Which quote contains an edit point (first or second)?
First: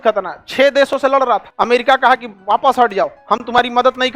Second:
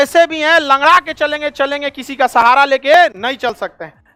first